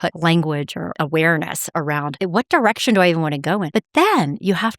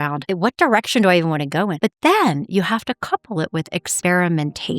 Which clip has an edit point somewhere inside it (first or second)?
second